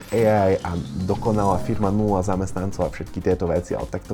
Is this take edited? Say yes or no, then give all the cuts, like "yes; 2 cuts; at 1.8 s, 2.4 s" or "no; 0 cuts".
no; 0 cuts